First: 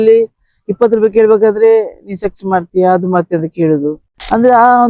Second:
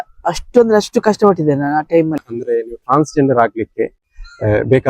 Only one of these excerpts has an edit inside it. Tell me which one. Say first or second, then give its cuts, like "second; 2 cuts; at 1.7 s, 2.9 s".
second; 1 cut; at 2.2 s